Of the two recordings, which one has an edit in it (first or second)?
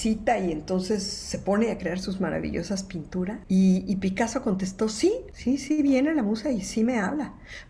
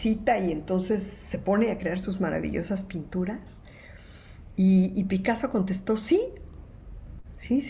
first